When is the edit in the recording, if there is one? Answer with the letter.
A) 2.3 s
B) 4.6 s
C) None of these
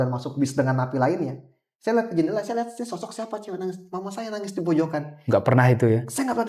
C